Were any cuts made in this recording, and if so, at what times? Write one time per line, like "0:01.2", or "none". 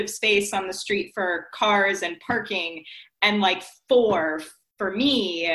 none